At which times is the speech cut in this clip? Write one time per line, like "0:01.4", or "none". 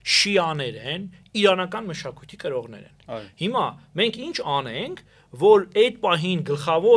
none